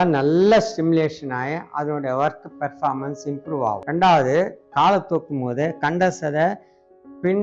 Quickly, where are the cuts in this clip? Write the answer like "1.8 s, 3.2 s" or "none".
3.8 s